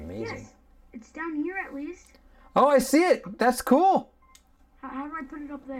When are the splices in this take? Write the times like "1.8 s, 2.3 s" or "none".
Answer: none